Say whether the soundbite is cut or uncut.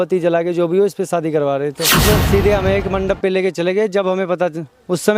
cut